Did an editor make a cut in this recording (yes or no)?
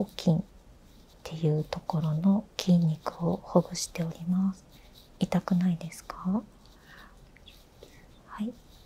no